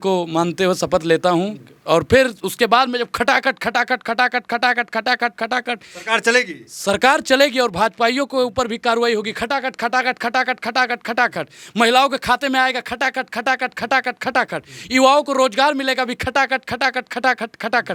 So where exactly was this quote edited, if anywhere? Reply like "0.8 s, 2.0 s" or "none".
none